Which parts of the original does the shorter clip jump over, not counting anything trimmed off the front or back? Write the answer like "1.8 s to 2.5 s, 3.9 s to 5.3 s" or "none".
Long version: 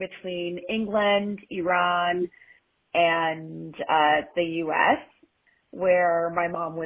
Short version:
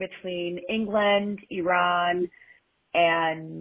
none